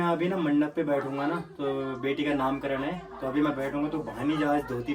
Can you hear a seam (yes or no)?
no